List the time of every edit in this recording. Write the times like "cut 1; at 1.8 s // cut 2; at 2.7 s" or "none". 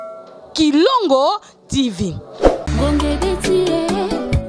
cut 1; at 2.6 s